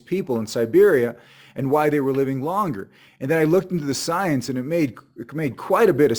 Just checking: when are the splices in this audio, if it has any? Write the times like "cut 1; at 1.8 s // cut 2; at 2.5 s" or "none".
none